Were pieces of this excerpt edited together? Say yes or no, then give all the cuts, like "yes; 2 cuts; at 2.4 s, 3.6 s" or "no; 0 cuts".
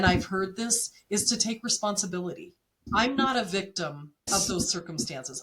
yes; 2 cuts; at 2.8 s, 4.3 s